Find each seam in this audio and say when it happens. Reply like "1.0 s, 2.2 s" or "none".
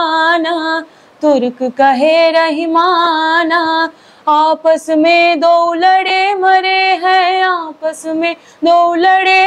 none